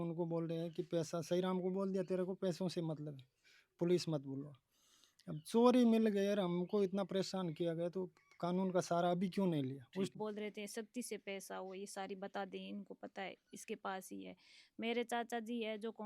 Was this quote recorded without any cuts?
no; 1 cut; at 10.1 s

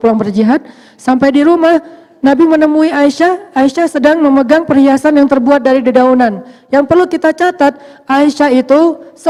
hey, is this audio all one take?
yes; 0 cuts

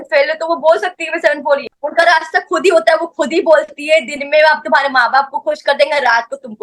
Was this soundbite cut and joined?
yes; 1 cut; at 1.6 s

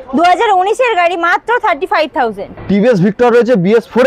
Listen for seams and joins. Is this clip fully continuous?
no; 1 cut; at 2.5 s

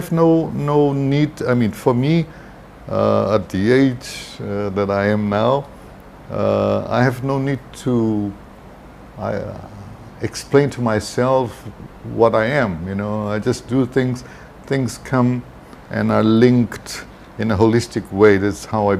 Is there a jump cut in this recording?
no; 0 cuts

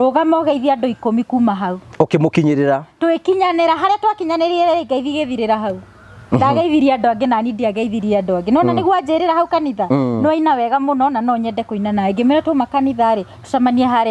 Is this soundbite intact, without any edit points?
yes; 0 cuts

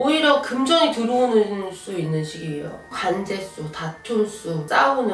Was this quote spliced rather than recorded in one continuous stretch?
yes; 1 cut; at 3.0 s

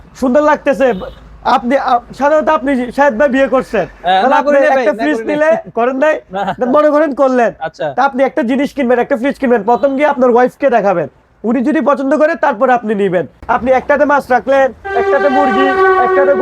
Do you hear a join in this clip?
yes; 1 cut; at 13.4 s

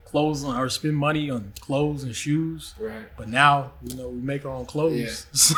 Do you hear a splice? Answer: no; 0 cuts

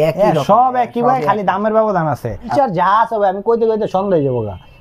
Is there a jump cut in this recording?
yes; 1 cut; at 2.5 s

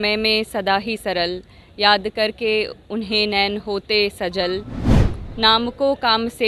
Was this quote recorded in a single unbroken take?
yes; 0 cuts

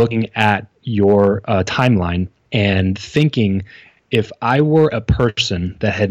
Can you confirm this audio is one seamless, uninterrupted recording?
yes; 0 cuts

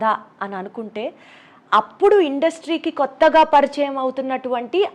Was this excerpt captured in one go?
yes; 0 cuts

